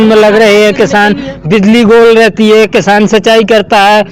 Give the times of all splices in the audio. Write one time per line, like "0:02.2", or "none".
none

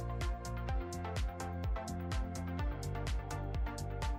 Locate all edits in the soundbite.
none

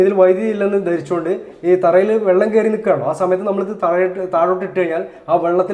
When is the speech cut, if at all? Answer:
none

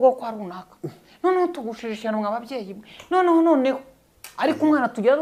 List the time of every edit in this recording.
none

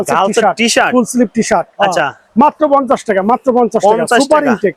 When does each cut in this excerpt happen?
none

